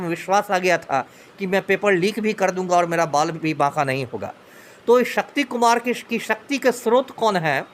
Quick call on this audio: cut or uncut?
uncut